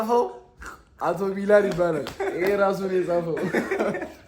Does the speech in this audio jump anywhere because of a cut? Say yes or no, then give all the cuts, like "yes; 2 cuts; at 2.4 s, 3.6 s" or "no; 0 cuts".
no; 0 cuts